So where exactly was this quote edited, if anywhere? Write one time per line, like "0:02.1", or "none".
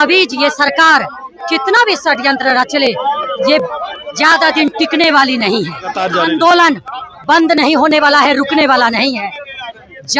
0:06.0